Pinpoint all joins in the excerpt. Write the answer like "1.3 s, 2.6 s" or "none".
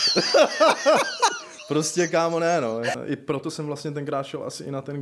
2.9 s